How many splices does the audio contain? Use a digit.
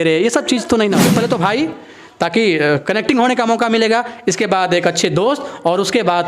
1